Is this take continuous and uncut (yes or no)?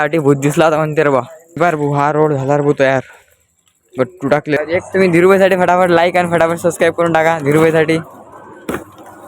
no